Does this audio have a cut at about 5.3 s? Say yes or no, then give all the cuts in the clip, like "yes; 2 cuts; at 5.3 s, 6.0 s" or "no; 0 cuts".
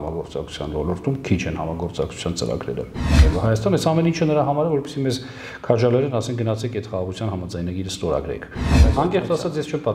no; 2 cuts; at 3.1 s, 8.8 s